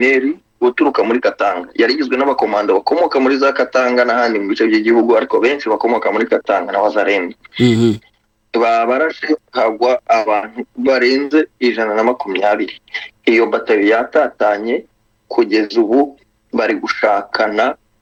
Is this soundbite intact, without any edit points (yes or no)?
yes